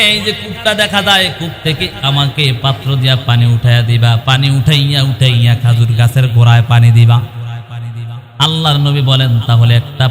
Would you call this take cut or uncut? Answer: uncut